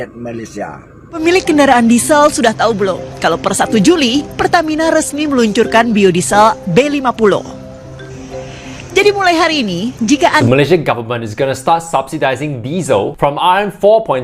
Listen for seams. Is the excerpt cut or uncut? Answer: cut